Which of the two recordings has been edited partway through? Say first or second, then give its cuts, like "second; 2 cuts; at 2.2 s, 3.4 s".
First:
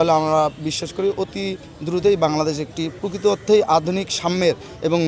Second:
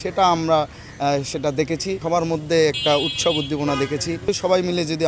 second; 2 cuts; at 2.0 s, 4.3 s